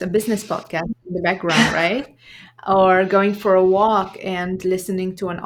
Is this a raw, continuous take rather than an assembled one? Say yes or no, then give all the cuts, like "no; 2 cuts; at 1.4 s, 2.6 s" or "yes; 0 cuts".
yes; 0 cuts